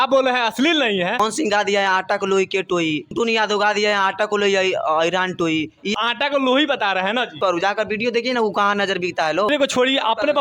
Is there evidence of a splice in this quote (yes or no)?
yes